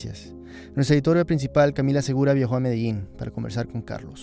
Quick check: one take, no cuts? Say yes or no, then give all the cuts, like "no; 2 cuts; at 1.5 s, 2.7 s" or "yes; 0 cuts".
no; 1 cut; at 3.0 s